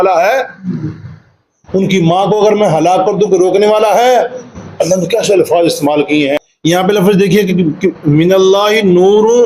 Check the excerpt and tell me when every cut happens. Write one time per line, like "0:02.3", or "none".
0:06.4